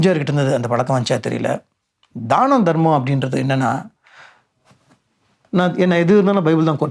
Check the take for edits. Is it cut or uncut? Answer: uncut